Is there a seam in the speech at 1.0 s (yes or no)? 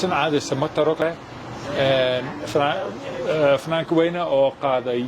yes